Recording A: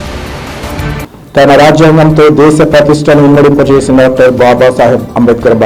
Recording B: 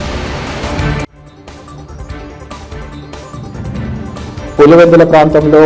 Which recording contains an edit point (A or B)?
A